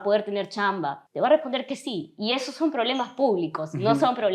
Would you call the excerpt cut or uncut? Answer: cut